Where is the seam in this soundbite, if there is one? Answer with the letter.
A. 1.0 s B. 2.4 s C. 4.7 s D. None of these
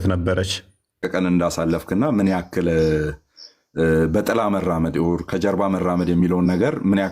A